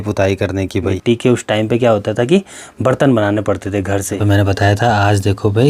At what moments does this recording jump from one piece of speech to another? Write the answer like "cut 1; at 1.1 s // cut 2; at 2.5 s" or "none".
cut 1; at 1.0 s // cut 2; at 4.2 s